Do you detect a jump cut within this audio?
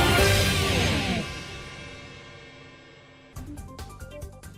yes; 1 cut; at 3.2 s

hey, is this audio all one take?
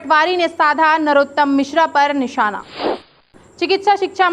no; 1 cut; at 3.1 s

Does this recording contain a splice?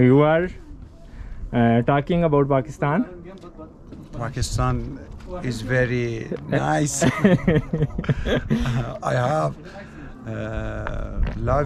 no; 0 cuts

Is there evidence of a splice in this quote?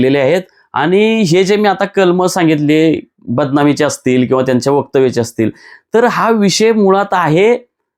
no; 0 cuts

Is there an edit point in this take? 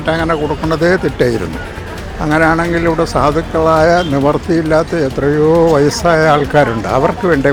no; 0 cuts

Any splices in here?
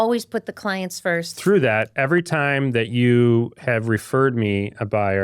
yes; 1 cut; at 1.3 s

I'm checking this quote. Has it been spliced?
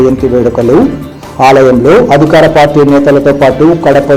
no; 0 cuts

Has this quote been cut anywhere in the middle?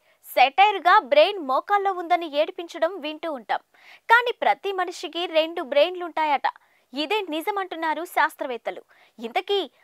no; 0 cuts

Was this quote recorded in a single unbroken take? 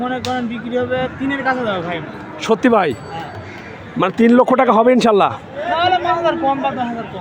yes; 0 cuts

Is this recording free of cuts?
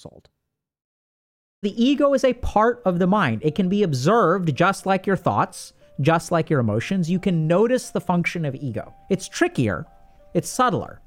no; 1 cut; at 1.6 s

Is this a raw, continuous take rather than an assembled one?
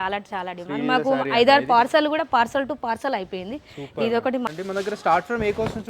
no; 1 cut; at 4.5 s

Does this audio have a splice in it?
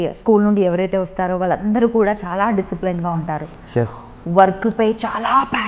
no; 0 cuts

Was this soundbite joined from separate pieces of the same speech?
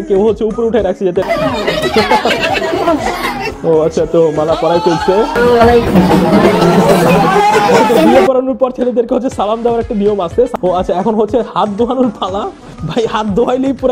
yes; 3 cuts; at 1.2 s, 5.4 s, 10.5 s

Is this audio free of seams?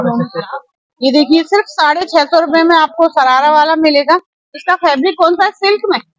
yes; 0 cuts

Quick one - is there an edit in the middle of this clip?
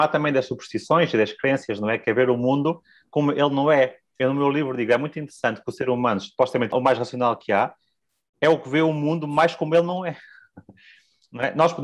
no; 0 cuts

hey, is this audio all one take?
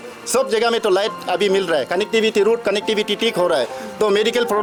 yes; 0 cuts

